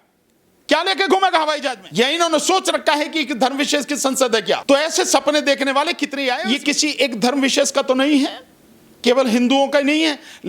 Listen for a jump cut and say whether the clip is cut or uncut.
cut